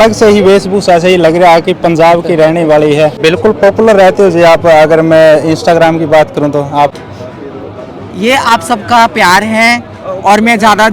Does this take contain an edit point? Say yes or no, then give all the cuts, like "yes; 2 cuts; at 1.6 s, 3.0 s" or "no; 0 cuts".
yes; 2 cuts; at 3.2 s, 6.9 s